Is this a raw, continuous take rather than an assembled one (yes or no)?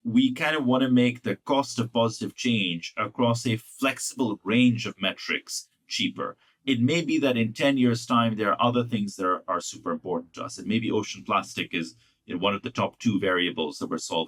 yes